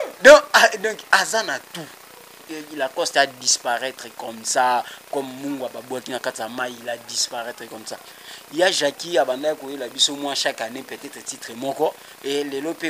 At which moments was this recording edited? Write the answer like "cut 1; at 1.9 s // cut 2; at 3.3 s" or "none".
cut 1; at 2.4 s